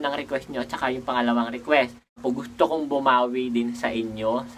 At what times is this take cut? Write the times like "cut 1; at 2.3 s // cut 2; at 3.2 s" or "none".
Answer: cut 1; at 2.2 s